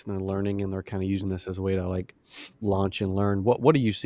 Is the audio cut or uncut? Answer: uncut